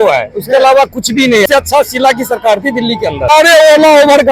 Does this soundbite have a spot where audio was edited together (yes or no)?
yes